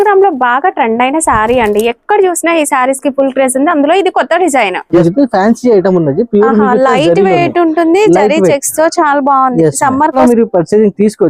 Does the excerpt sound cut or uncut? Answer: cut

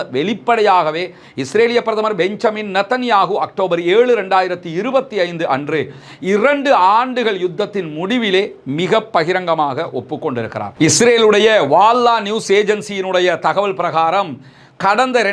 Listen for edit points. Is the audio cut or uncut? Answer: cut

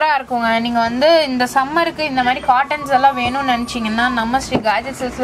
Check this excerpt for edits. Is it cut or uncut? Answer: uncut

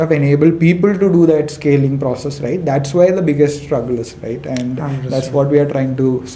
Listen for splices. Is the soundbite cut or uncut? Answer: uncut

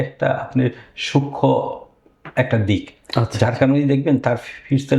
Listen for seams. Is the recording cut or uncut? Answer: uncut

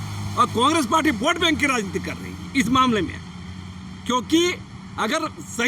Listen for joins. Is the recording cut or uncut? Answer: uncut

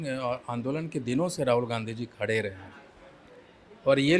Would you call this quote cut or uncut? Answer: uncut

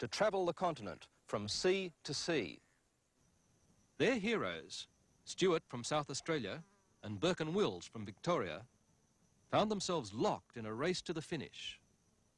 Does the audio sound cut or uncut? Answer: uncut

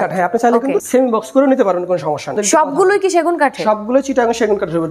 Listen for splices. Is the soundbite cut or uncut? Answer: cut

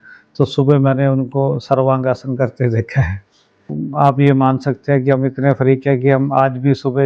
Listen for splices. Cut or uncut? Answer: cut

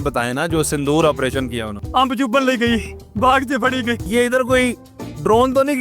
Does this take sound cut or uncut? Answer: cut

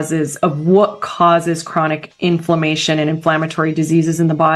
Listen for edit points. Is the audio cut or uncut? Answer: uncut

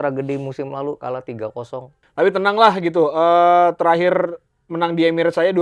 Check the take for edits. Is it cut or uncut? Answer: cut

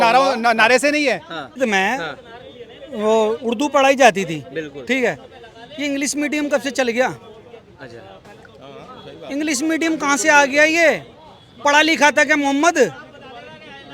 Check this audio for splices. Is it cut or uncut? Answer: cut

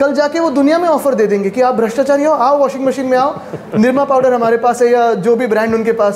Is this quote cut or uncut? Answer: uncut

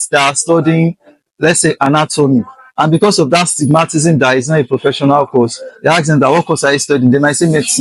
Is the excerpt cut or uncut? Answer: uncut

